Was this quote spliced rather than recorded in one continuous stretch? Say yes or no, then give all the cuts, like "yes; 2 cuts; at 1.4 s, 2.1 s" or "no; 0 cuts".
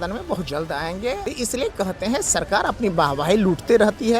yes; 1 cut; at 1.2 s